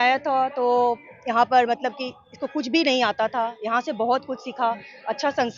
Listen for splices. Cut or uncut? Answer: uncut